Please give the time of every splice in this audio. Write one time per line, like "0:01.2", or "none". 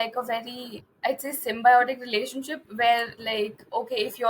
0:03.2